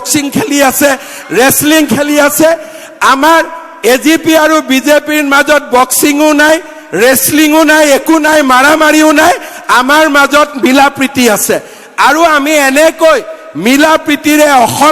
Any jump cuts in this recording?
no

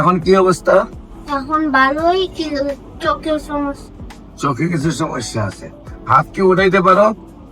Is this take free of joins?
yes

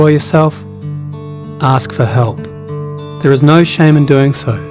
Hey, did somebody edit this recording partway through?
no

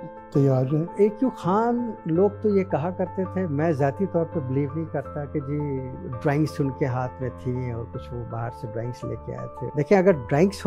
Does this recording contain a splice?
yes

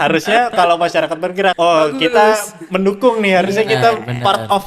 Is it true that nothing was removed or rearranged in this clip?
no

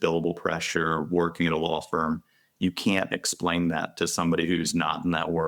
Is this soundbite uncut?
yes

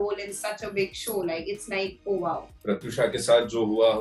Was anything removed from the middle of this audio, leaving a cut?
yes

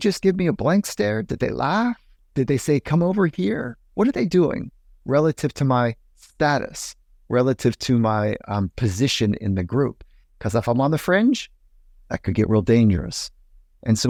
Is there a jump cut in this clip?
no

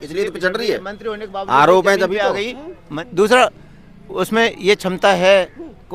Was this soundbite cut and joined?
yes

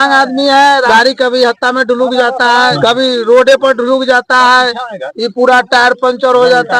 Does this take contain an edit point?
yes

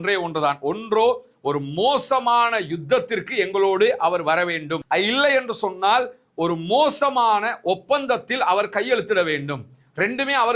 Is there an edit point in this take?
no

